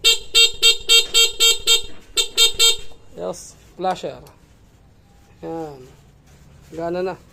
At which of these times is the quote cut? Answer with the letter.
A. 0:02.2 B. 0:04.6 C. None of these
C